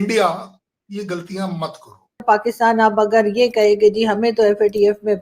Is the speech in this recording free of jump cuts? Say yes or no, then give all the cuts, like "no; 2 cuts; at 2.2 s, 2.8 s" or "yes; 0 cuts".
no; 1 cut; at 2.2 s